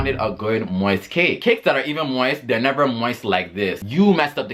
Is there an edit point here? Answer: yes; 2 cuts; at 1.4 s, 3.8 s

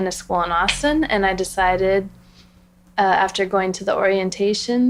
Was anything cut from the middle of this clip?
no; 0 cuts

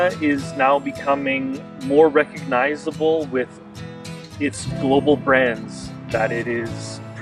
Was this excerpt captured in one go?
yes; 0 cuts

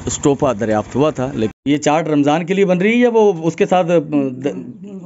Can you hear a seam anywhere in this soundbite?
yes; 1 cut; at 1.5 s

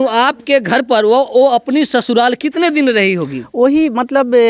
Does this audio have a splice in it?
no; 0 cuts

